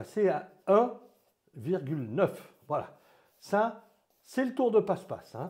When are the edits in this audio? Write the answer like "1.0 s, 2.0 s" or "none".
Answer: none

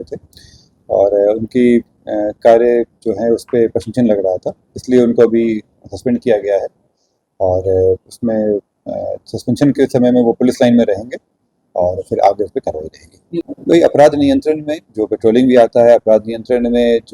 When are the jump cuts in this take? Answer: 13.5 s

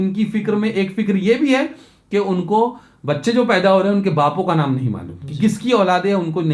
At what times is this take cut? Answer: none

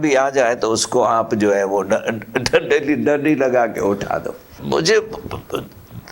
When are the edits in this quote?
none

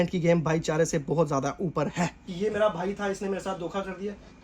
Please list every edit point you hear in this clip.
2.2 s

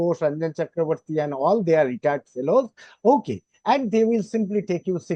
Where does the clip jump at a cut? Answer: none

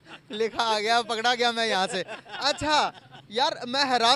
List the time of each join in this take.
none

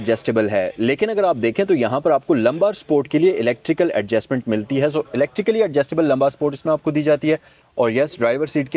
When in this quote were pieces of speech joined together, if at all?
none

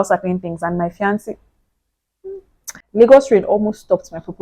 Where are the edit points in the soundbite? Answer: 2.8 s

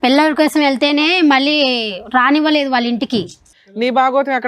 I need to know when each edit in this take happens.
3.5 s

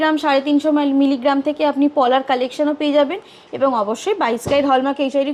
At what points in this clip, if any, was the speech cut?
none

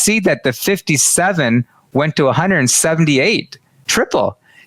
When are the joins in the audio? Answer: 3.8 s

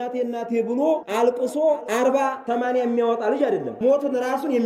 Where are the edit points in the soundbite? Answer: 1.1 s, 2.2 s, 3.7 s

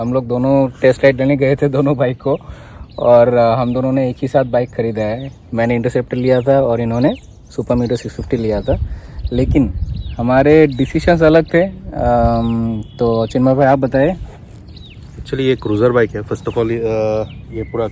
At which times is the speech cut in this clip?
none

